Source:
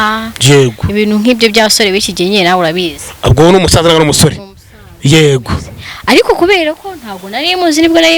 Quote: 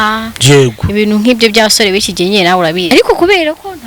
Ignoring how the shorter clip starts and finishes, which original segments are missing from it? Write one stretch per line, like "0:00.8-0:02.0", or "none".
0:02.9-0:06.1